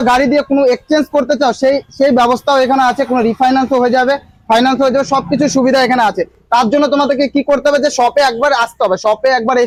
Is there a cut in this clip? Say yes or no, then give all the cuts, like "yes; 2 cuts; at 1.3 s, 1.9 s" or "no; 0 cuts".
no; 0 cuts